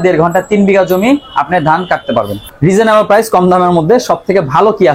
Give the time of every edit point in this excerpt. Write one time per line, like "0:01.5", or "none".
0:02.3